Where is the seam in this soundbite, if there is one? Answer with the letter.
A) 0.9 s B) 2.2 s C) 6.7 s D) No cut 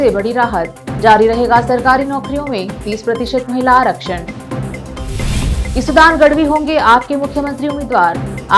D